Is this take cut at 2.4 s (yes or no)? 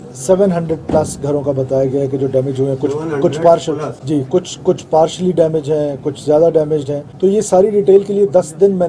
no